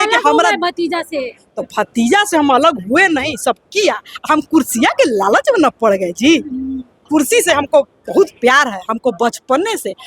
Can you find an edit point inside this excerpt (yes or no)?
yes